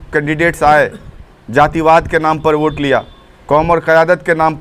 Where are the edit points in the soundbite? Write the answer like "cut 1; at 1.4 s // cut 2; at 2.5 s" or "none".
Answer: none